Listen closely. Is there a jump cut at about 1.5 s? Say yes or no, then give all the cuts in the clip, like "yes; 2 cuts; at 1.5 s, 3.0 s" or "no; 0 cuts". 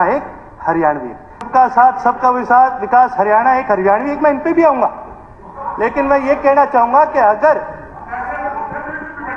yes; 1 cut; at 1.5 s